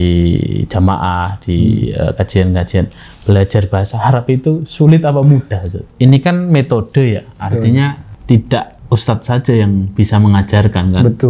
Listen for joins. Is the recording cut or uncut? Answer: cut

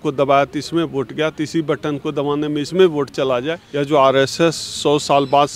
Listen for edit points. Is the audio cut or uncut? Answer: cut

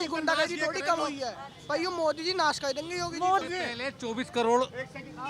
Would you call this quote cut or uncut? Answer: cut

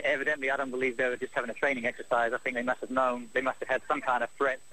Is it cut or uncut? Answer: uncut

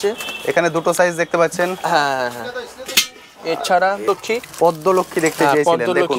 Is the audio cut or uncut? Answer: cut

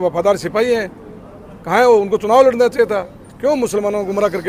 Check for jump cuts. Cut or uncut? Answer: uncut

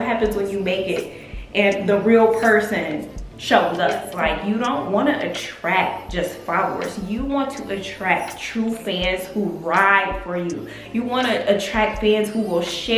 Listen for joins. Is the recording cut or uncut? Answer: cut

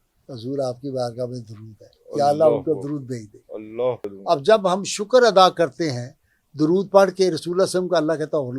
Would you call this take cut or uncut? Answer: cut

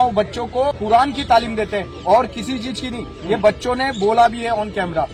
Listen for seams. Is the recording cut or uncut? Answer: uncut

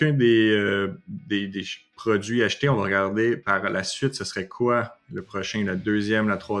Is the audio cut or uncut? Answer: uncut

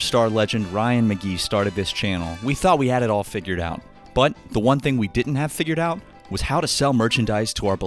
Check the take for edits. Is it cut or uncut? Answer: uncut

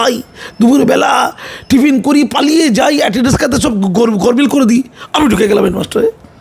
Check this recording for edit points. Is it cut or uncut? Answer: uncut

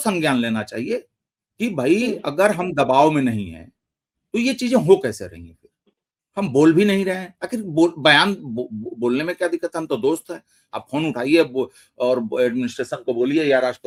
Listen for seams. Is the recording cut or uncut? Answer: uncut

